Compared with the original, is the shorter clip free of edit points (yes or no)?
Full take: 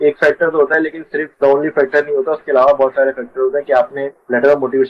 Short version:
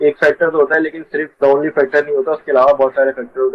yes